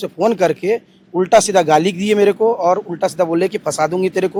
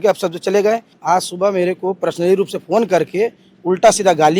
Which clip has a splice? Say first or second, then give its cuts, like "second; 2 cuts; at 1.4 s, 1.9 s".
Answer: second; 1 cut; at 1.0 s